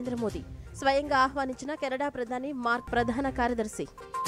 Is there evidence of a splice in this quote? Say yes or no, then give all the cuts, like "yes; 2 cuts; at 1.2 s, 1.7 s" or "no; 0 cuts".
yes; 1 cut; at 2.9 s